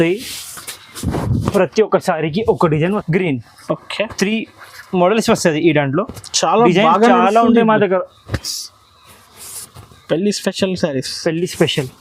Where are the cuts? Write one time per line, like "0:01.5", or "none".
0:03.0

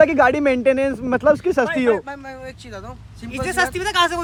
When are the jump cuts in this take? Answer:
none

